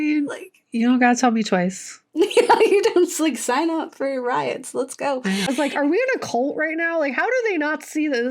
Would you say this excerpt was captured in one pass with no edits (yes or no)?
no